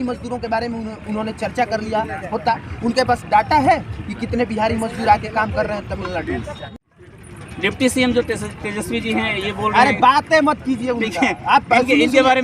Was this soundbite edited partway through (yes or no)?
yes